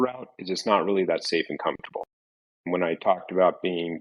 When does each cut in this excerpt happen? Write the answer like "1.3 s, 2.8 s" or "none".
none